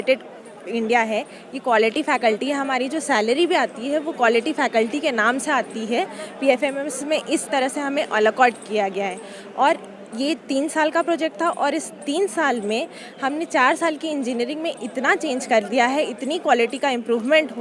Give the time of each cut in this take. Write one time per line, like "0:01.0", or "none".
none